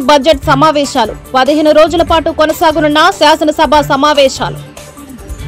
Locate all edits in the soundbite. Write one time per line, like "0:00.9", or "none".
0:04.5